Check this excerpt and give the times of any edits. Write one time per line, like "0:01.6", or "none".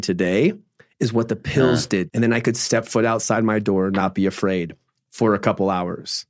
0:02.1